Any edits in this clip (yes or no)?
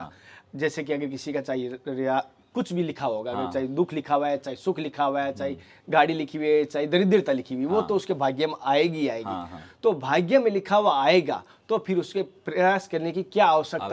no